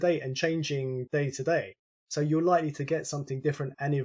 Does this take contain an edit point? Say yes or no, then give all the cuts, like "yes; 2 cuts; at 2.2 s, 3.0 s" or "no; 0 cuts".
no; 0 cuts